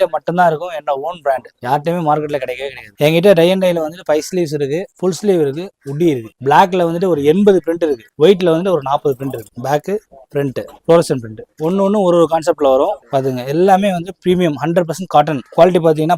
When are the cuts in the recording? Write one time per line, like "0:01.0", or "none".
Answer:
0:02.9
0:06.3
0:09.6
0:13.0